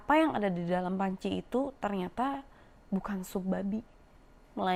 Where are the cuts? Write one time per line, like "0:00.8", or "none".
none